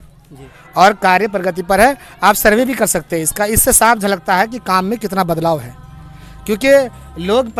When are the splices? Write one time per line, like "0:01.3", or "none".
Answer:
none